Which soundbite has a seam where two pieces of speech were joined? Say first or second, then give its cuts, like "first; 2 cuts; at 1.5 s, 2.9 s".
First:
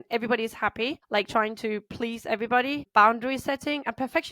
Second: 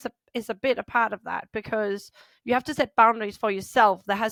first; 2 cuts; at 1.0 s, 2.8 s